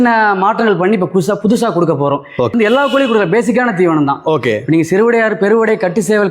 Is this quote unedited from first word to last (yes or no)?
no